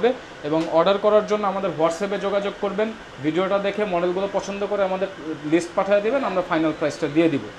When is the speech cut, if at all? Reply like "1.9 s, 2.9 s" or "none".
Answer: none